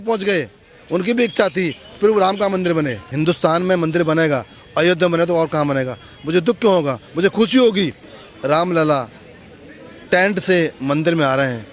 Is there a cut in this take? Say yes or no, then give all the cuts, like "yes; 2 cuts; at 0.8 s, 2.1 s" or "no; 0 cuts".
yes; 2 cuts; at 3.0 s, 8.1 s